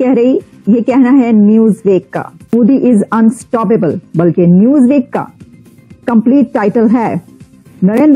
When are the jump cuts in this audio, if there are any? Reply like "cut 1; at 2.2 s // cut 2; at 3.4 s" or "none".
cut 1; at 2.5 s